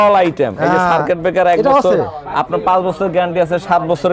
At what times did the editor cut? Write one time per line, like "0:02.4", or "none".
none